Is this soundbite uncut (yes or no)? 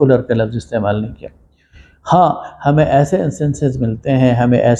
yes